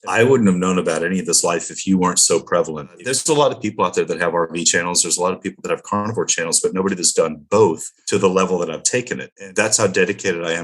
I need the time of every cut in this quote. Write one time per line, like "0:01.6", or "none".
0:03.0
0:07.9
0:09.3